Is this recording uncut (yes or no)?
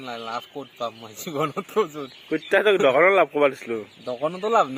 yes